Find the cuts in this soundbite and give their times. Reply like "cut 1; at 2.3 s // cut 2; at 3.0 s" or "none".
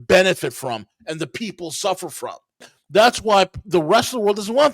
cut 1; at 2.7 s